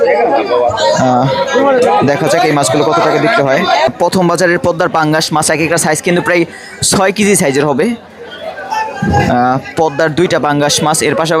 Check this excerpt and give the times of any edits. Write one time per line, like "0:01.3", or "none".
0:03.9